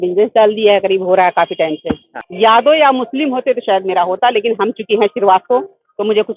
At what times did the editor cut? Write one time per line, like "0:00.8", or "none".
0:02.2